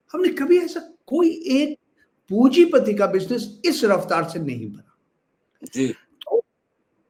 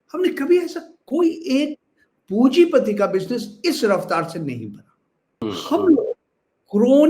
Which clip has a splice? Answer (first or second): second